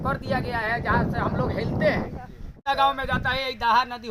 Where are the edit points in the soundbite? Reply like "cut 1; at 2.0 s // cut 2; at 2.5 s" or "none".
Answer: cut 1; at 2.7 s